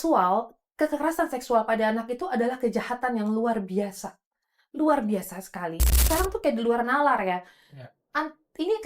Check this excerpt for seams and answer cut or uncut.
cut